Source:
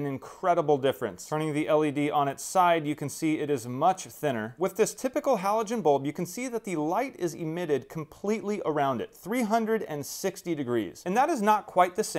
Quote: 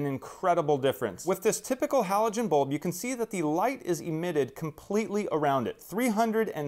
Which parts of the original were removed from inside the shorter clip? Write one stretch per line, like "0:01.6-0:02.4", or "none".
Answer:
0:01.2-0:04.5